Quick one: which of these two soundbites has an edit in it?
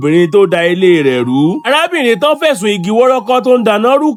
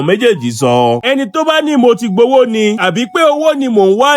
second; 1 cut; at 1.0 s

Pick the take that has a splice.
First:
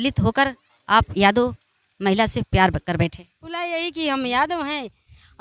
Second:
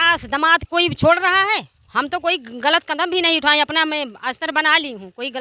first; 1 cut; at 3.7 s

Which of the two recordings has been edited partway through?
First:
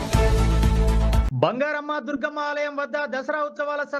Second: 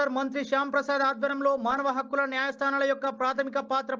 first; 1 cut; at 1.2 s

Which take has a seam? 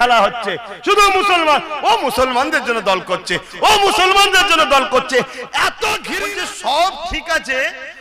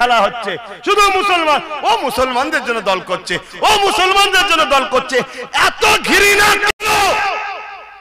first; 1 cut; at 6.1 s

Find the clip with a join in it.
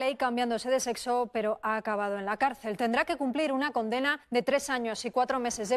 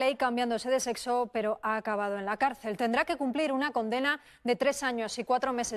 first; 1 cut; at 4.2 s

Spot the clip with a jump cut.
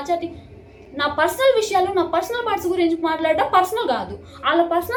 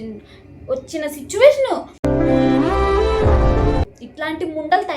second; 1 cut; at 3.8 s

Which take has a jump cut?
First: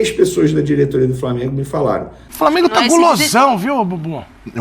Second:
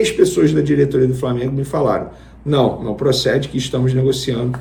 first; 1 cut; at 2.2 s

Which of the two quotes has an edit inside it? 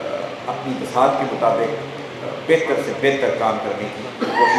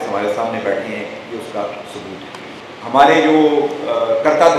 second; 1 cut; at 2.6 s

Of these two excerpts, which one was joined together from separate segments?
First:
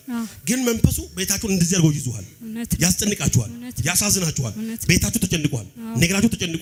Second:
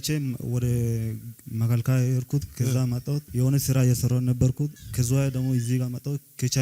second; 2 cuts; at 3.3 s, 4.9 s

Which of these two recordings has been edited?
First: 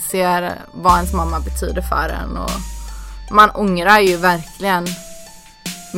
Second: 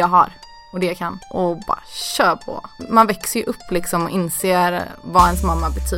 second; 2 cuts; at 1.2 s, 2.8 s

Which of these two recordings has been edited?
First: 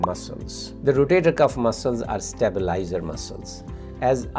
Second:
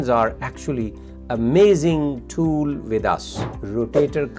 second; 1 cut; at 3.4 s

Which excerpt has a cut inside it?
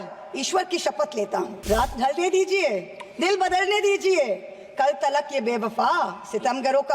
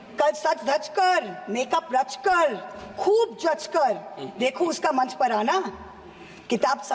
first; 1 cut; at 1.6 s

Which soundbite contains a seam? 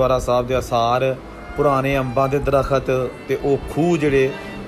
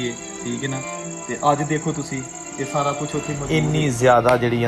second; 1 cut; at 3.4 s

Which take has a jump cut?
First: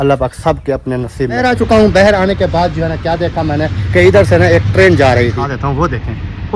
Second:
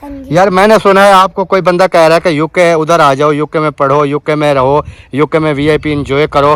first; 2 cuts; at 1.4 s, 5.5 s

